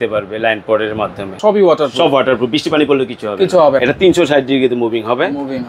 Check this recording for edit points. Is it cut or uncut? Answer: cut